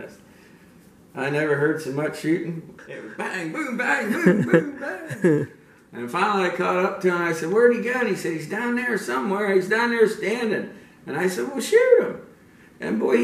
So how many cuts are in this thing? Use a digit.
1